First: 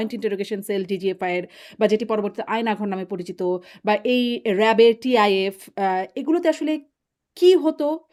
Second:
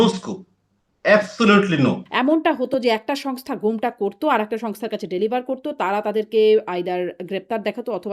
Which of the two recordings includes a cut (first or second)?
second